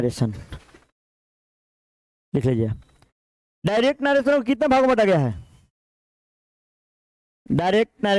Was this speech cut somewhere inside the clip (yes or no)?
no